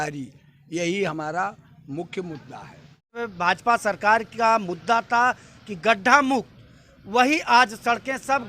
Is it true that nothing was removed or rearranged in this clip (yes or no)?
no